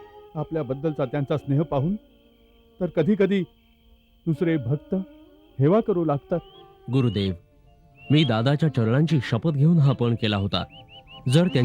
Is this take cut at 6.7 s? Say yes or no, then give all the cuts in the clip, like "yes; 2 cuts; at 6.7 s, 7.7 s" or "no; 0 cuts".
yes; 1 cut; at 6.7 s